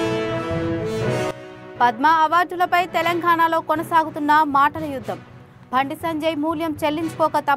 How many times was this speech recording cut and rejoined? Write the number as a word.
one